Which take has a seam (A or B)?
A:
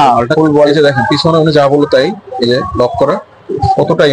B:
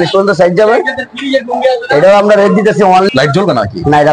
B